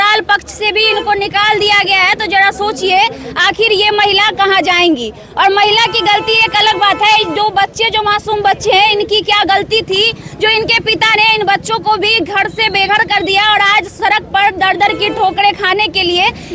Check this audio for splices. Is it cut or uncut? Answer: uncut